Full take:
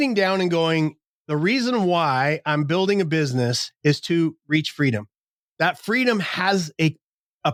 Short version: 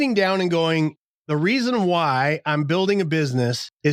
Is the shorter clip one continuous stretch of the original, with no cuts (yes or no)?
yes